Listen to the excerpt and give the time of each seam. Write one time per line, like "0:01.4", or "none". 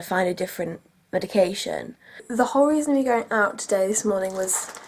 0:02.3